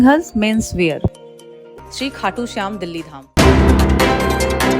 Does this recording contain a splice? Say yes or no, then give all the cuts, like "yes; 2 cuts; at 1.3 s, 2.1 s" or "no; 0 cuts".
yes; 1 cut; at 3.2 s